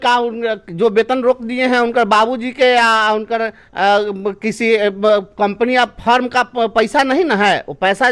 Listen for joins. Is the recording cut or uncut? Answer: uncut